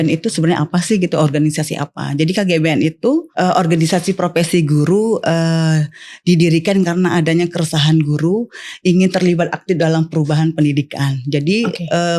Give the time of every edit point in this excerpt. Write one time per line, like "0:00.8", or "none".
0:03.3